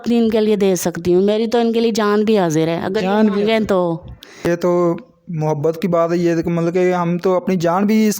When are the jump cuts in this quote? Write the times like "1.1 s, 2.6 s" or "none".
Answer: 4.4 s

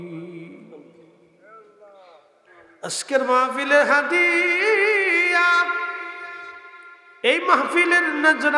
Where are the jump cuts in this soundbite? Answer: 2.5 s

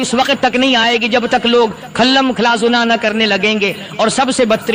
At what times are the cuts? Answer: none

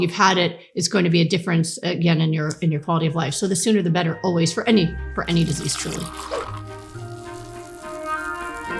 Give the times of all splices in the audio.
6.1 s

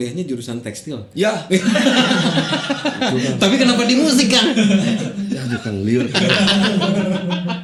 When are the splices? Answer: none

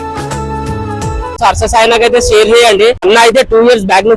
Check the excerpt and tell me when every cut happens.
1.4 s, 3.0 s

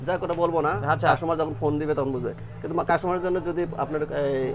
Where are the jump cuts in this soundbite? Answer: none

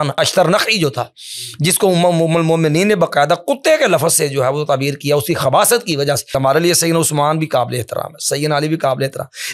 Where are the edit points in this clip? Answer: 6.3 s

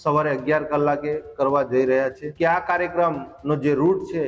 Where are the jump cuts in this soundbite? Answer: 2.2 s

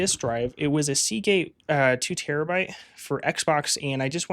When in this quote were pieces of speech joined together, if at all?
none

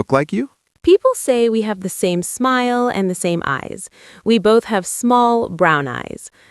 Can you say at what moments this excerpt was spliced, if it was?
none

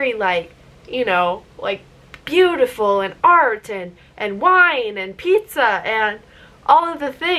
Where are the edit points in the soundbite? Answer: none

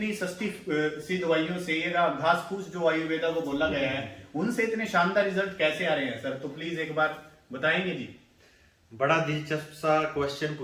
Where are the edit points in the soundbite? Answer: none

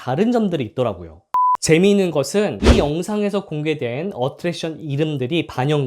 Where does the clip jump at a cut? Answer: 1.2 s

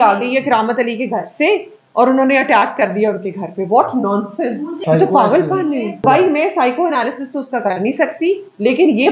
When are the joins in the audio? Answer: 4.8 s, 6.0 s

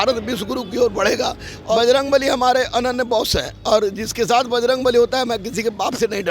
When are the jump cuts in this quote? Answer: 1.7 s

